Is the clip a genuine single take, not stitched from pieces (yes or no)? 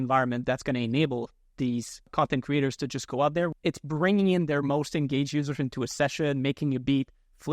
no